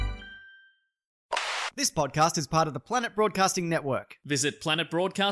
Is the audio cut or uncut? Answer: cut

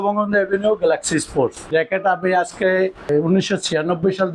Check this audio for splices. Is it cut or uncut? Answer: cut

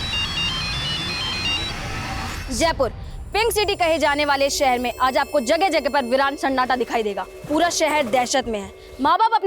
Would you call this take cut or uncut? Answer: cut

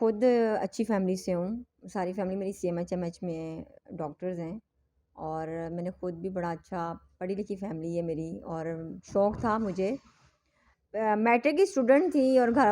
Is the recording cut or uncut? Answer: uncut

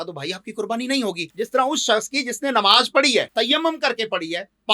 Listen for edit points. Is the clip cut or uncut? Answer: cut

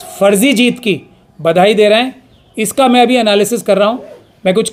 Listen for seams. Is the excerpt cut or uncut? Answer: uncut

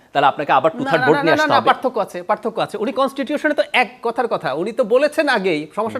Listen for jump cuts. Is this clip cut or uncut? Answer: uncut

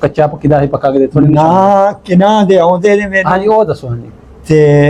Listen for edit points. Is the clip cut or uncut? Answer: uncut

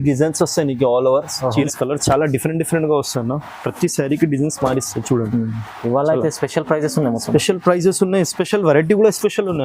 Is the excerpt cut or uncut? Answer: cut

